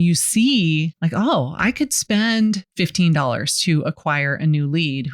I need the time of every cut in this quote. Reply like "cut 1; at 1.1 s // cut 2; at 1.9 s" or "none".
cut 1; at 0.9 s // cut 2; at 2.7 s